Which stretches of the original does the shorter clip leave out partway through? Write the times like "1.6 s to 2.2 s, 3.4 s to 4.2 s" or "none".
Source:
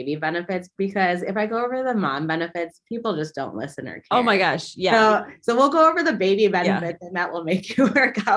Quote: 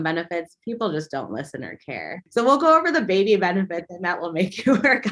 4.3 s to 5.2 s